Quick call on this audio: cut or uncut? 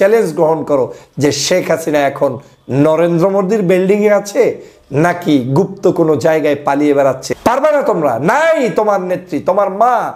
cut